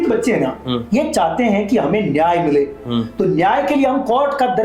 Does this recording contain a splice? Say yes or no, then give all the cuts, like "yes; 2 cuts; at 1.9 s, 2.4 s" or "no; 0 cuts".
no; 0 cuts